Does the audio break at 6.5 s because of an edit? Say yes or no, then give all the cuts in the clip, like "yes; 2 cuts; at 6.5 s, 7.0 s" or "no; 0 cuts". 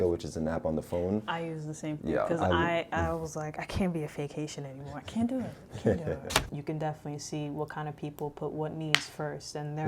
yes; 1 cut; at 6.5 s